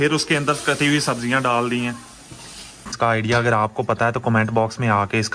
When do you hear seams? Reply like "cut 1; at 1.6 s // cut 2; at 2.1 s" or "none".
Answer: cut 1; at 3.0 s